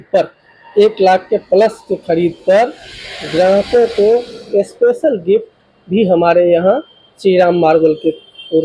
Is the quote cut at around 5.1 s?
no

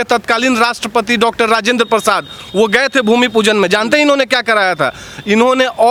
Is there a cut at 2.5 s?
no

